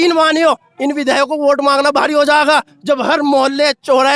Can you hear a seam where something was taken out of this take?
no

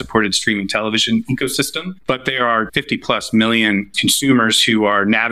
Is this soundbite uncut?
no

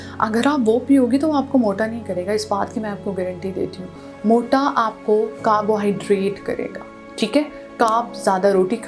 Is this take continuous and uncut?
yes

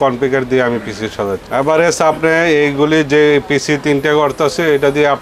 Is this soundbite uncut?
no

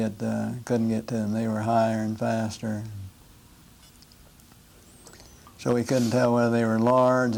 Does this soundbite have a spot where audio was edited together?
no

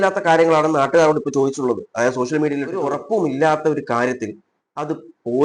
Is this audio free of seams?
no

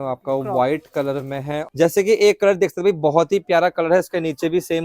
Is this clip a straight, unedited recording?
no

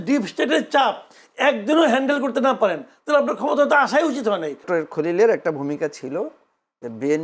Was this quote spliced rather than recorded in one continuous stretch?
yes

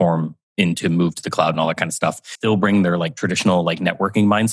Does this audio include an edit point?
yes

